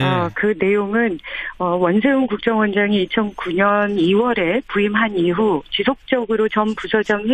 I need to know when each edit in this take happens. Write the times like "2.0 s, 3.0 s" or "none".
5.4 s